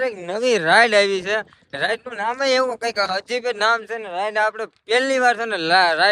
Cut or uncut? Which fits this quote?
uncut